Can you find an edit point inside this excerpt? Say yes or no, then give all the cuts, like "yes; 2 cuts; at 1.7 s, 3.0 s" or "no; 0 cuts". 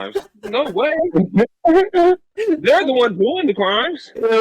no; 0 cuts